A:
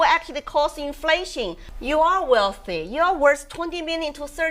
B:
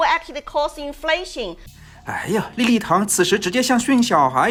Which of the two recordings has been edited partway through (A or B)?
A